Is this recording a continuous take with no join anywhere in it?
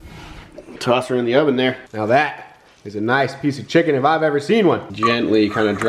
no; 2 cuts; at 1.9 s, 4.9 s

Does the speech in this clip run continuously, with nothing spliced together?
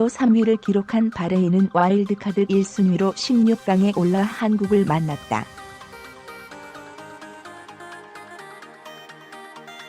no; 1 cut; at 5.5 s

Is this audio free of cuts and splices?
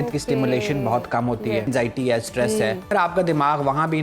no; 2 cuts; at 1.7 s, 2.9 s

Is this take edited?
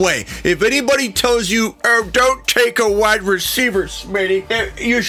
no; 0 cuts

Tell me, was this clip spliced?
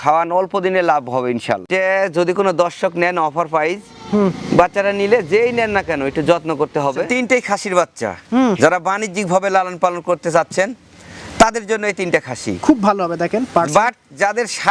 yes; 2 cuts; at 1.7 s, 7.1 s

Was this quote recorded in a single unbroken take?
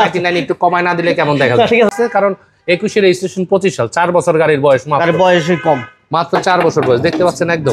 no; 1 cut; at 1.9 s

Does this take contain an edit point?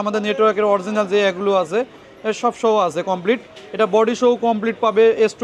no; 0 cuts

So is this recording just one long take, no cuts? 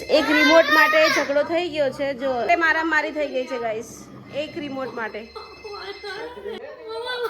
no; 2 cuts; at 2.4 s, 6.6 s

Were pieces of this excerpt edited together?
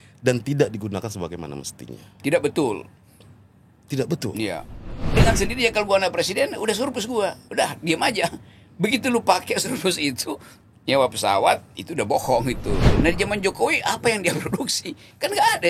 yes; 2 cuts; at 5.1 s, 12.9 s

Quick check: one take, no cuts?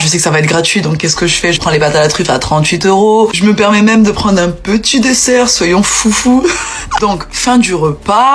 no; 1 cut; at 6.8 s

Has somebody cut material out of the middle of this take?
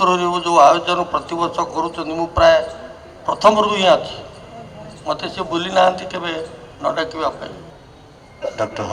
yes; 1 cut; at 7.7 s

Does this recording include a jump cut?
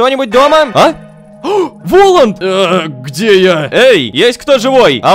no; 0 cuts

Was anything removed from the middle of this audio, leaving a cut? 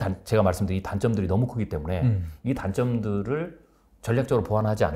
no; 0 cuts

